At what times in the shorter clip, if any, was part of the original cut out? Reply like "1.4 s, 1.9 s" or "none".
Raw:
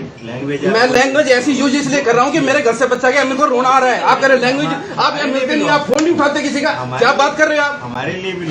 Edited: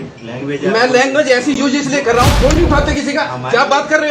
2.3 s